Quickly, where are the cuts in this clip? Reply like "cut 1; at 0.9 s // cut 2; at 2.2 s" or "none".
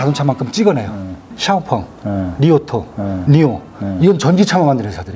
cut 1; at 1.3 s